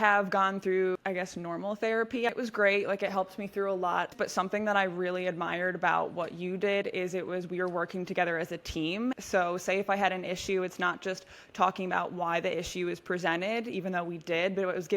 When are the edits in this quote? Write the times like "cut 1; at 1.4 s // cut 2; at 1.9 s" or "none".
cut 1; at 1.0 s // cut 2; at 2.3 s // cut 3; at 4.1 s // cut 4; at 9.2 s